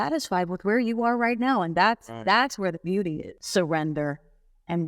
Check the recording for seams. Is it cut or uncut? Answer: cut